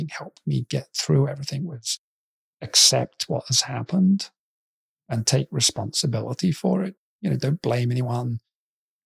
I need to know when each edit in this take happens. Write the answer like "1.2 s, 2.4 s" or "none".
7.1 s